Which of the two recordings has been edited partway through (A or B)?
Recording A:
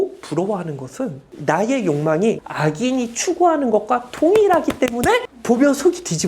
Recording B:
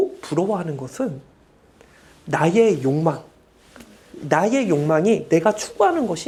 A